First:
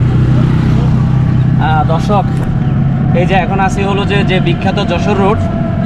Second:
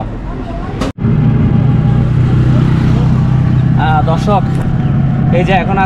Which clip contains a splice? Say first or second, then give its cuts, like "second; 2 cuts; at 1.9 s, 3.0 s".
second; 1 cut; at 0.9 s